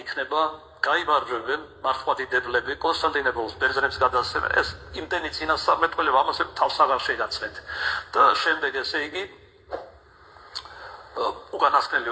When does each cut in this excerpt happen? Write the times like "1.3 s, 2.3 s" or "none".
6.8 s